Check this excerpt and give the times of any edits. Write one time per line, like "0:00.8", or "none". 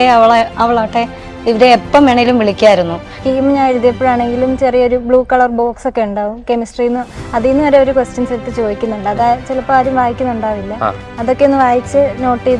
0:03.1